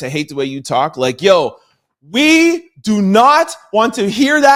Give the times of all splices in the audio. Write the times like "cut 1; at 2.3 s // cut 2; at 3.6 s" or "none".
none